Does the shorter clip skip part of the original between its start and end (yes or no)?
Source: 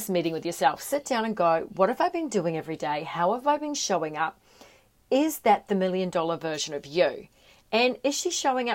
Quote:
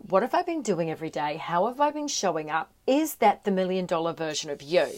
yes